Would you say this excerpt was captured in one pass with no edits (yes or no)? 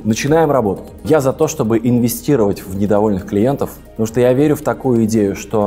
no